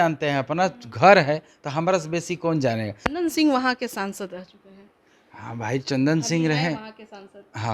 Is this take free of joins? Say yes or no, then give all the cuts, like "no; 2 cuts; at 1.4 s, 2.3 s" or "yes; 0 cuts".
no; 1 cut; at 3.0 s